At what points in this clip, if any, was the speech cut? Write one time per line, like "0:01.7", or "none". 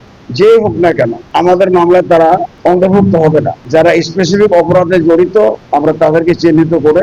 0:01.2
0:02.5
0:03.6
0:05.6